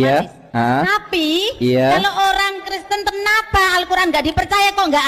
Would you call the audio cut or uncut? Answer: uncut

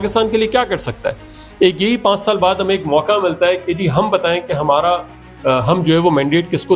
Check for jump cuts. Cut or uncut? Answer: uncut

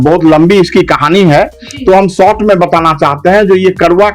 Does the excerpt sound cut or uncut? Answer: uncut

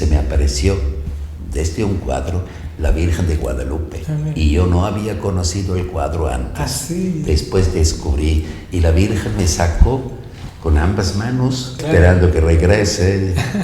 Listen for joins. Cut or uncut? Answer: cut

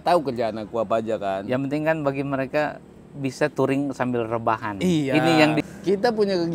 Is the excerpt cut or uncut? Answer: cut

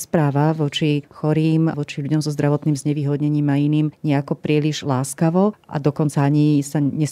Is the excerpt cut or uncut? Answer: uncut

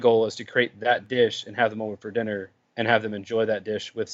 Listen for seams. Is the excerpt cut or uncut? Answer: cut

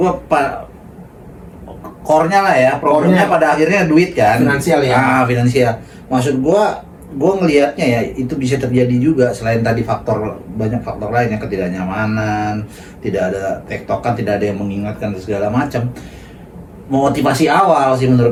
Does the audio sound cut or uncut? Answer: uncut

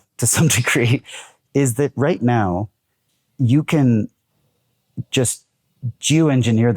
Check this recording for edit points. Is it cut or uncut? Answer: uncut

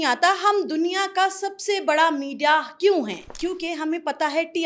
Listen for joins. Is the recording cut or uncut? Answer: cut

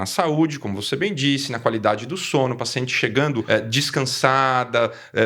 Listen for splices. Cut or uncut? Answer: cut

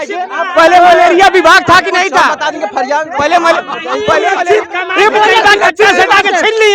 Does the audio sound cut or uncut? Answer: uncut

